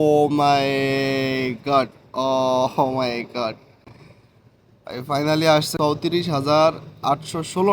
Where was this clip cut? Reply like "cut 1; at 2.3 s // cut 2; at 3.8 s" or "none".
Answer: cut 1; at 5.7 s